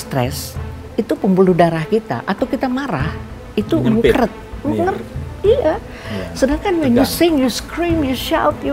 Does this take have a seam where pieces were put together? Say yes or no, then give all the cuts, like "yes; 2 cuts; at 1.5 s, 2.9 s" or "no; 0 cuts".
no; 0 cuts